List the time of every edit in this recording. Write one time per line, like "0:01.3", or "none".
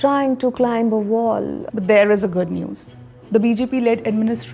0:01.6